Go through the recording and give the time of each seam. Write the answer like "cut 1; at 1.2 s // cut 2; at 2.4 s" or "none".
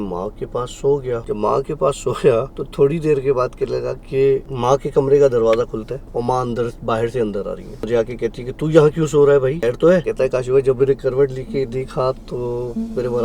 cut 1; at 1.2 s // cut 2; at 2.6 s // cut 3; at 4.5 s // cut 4; at 6.0 s // cut 5; at 7.9 s // cut 6; at 9.9 s